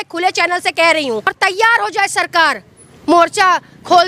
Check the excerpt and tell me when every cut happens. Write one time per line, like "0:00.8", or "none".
0:01.4